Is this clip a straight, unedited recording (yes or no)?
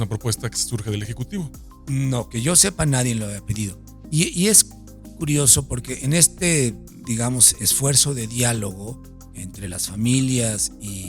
yes